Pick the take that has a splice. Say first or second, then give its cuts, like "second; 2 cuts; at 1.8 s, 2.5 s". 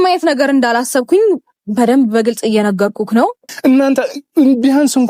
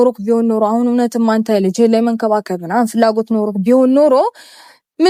first; 1 cut; at 3.4 s